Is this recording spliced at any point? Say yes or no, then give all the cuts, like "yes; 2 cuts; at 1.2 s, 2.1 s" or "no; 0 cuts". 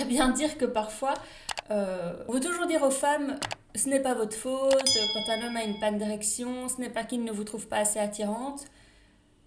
yes; 1 cut; at 2.2 s